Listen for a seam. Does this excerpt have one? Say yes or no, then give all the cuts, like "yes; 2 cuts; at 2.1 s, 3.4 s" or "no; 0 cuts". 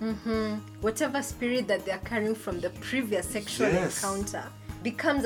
no; 0 cuts